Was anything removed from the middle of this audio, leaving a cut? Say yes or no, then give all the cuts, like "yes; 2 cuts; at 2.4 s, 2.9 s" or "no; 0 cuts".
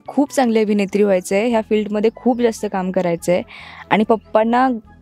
no; 0 cuts